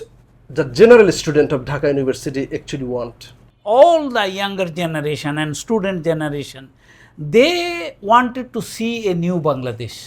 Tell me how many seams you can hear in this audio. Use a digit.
1